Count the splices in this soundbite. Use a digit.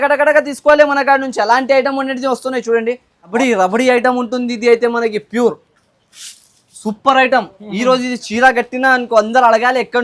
1